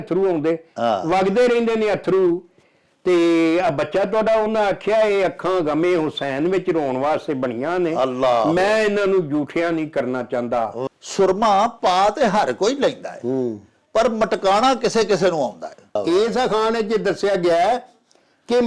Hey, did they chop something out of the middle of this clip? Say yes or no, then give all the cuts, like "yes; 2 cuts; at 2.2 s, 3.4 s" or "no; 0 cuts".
yes; 2 cuts; at 10.9 s, 16.0 s